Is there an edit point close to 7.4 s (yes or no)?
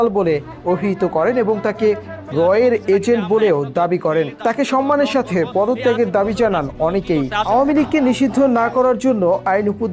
yes